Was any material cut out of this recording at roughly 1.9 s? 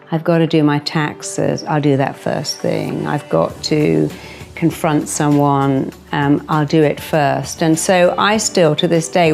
no; 0 cuts

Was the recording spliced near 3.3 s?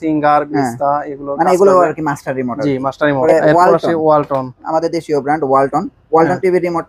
yes; 1 cut; at 3.3 s

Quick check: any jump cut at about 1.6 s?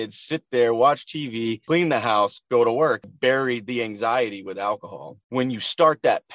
yes; 3 cuts; at 1.6 s, 3.1 s, 5.2 s

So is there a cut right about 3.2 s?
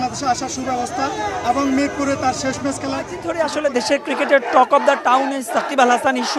yes; 1 cut; at 3.2 s

